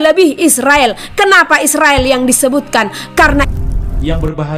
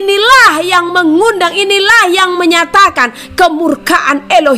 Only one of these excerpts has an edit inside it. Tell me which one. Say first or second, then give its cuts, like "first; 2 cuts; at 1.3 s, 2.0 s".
first; 1 cut; at 3.5 s